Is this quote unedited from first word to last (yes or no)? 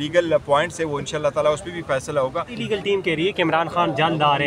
no